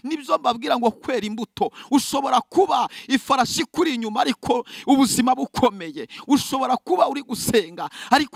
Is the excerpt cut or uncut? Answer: uncut